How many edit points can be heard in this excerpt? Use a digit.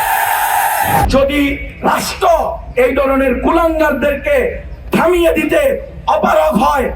1